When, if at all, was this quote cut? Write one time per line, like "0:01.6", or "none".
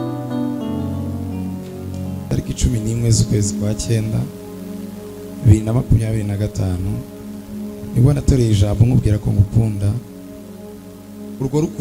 0:02.3